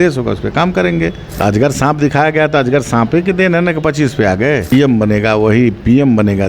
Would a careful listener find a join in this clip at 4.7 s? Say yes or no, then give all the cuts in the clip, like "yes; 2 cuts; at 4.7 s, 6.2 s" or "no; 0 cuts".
yes; 2 cuts; at 1.3 s, 4.7 s